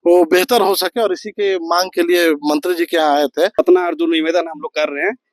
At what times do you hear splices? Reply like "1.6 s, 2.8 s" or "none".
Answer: 3.6 s